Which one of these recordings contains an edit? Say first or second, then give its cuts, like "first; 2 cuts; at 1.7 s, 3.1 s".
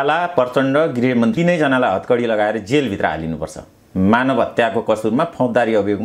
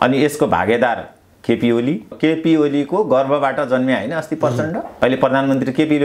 second; 2 cuts; at 2.1 s, 4.9 s